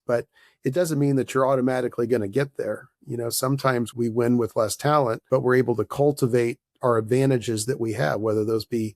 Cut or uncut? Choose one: cut